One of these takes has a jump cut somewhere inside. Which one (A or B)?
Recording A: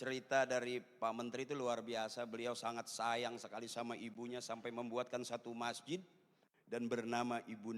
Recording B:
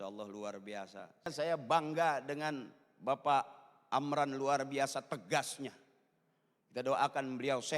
B